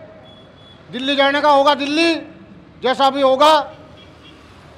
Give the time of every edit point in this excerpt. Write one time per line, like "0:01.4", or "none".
none